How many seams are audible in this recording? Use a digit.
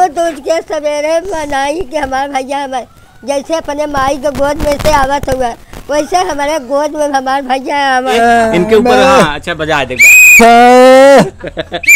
1